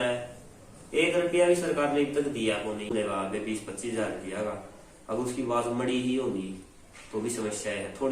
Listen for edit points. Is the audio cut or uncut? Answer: cut